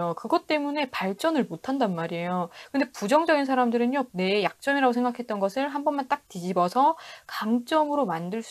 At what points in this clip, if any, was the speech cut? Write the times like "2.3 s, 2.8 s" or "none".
4.1 s